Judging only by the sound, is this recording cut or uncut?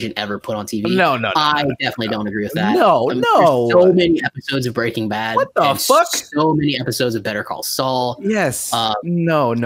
uncut